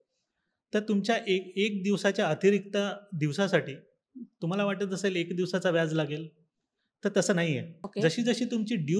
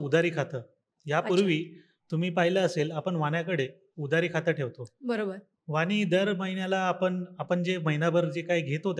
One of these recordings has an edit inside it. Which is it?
first; 1 cut; at 7.8 s

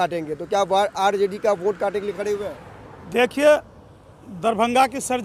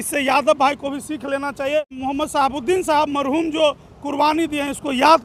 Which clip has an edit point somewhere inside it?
second; 1 cut; at 1.9 s

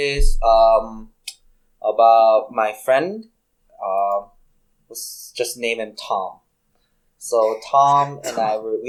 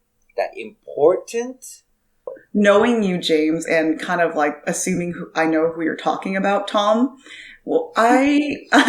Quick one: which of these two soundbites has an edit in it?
second; 1 cut; at 2.4 s

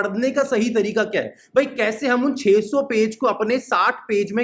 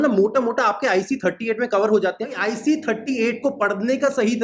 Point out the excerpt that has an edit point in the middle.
second; 1 cut; at 2.4 s

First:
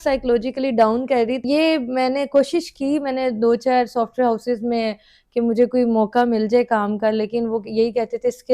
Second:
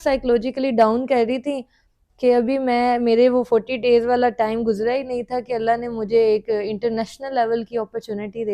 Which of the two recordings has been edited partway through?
first; 1 cut; at 1.4 s

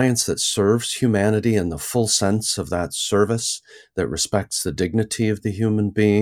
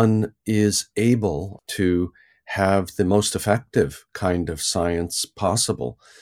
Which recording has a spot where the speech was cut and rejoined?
second; 1 cut; at 1.5 s

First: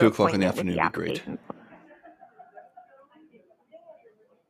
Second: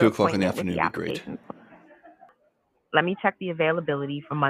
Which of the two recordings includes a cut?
second; 1 cut; at 2.3 s

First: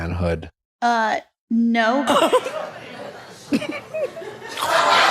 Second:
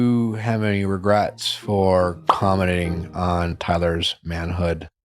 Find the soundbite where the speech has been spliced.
first; 1 cut; at 1.8 s

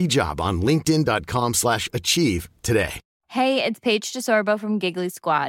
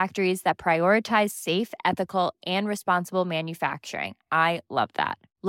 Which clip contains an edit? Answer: first; 1 cut; at 3.1 s

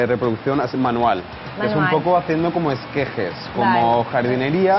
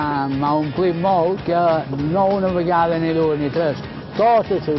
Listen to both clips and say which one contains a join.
second; 1 cut; at 1.4 s

